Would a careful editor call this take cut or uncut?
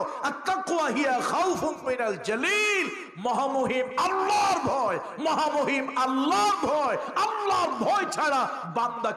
uncut